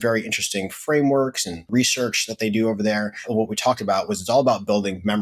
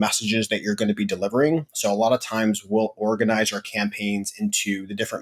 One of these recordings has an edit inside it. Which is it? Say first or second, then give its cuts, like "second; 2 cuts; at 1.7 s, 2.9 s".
first; 2 cuts; at 1.7 s, 3.3 s